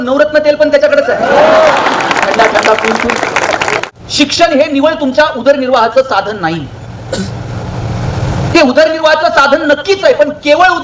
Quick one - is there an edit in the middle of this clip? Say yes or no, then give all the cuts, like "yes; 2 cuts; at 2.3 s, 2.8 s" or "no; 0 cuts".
yes; 1 cut; at 3.8 s